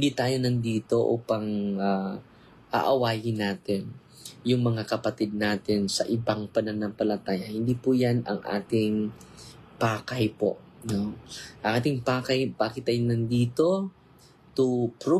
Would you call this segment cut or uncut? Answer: uncut